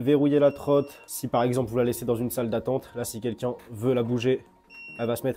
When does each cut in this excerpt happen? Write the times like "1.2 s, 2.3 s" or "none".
none